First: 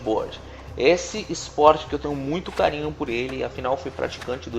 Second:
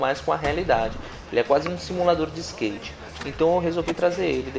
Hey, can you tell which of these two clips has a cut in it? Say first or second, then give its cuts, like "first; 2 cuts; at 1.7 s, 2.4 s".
first; 1 cut; at 1.4 s